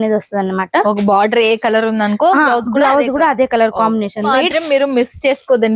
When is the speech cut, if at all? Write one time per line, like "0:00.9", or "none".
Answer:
0:04.3

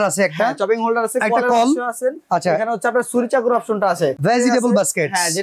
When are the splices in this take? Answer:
0:04.2

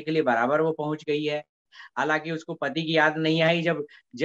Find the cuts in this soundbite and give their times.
none

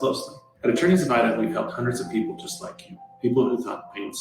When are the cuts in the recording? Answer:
0:01.1

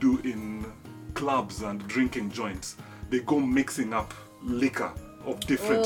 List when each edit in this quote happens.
none

